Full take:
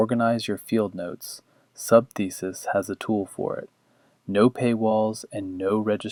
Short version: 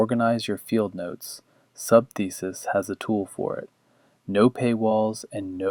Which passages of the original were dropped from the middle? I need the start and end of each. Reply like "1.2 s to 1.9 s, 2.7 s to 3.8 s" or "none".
none